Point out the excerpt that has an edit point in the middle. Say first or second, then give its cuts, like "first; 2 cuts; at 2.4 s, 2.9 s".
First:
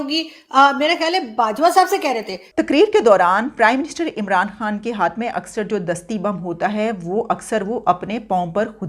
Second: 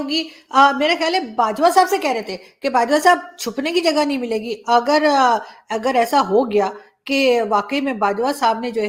first; 1 cut; at 2.4 s